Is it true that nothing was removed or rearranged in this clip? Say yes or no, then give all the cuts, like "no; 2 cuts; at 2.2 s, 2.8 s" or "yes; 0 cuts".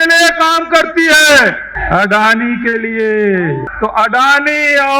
no; 2 cuts; at 1.7 s, 3.7 s